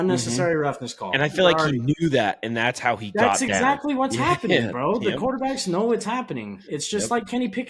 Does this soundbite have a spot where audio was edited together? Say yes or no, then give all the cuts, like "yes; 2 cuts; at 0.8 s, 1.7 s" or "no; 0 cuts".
no; 0 cuts